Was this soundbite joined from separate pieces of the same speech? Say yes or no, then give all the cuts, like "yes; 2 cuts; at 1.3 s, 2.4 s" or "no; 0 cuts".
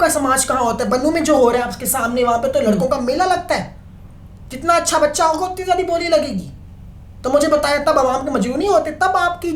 no; 0 cuts